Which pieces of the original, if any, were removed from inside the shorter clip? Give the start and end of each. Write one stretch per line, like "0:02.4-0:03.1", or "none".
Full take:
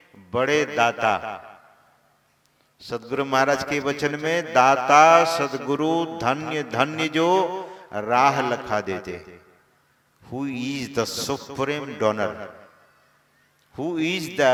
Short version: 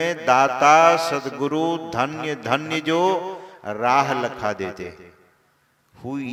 none